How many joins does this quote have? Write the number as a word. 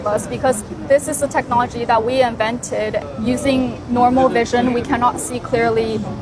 one